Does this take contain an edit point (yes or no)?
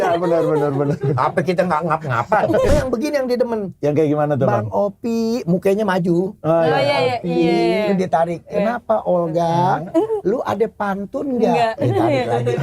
yes